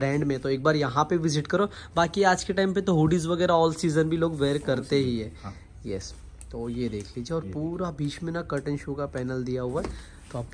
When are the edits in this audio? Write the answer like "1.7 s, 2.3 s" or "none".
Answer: none